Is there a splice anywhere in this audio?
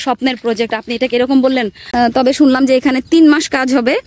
yes; 1 cut; at 1.9 s

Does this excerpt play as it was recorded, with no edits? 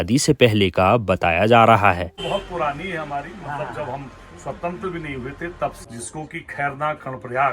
no; 2 cuts; at 2.2 s, 5.8 s

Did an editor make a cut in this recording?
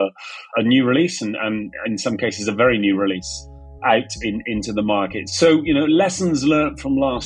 no; 0 cuts

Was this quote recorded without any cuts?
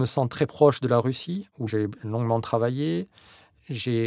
no; 1 cut; at 1.7 s

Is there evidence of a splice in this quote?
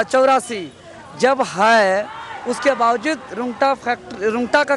no; 0 cuts

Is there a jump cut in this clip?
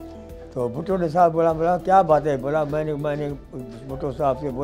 no; 0 cuts

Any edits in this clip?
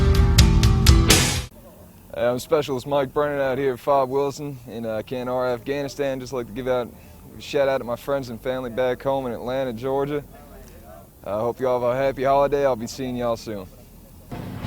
yes; 1 cut; at 12.4 s

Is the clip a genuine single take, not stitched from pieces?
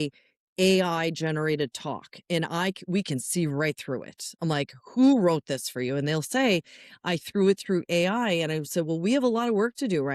yes; 0 cuts

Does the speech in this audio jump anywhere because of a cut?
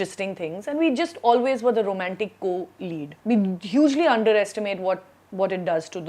yes; 1 cut; at 3.1 s

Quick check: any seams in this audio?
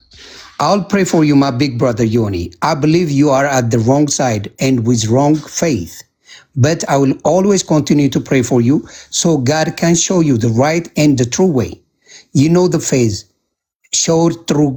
no; 0 cuts

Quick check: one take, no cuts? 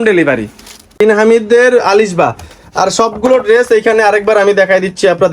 no; 1 cut; at 0.9 s

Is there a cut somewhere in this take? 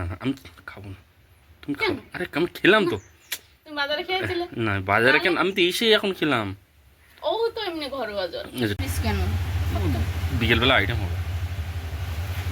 yes; 1 cut; at 8.8 s

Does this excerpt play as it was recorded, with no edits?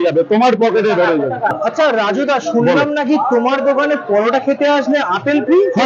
no; 1 cut; at 1.5 s

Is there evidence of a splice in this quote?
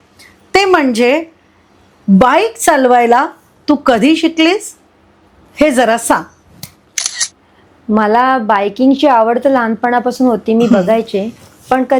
no; 0 cuts

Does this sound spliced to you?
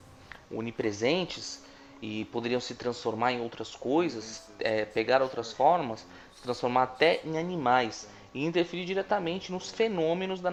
no; 0 cuts

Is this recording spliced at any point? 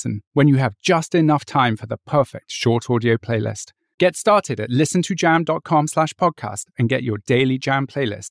no; 0 cuts

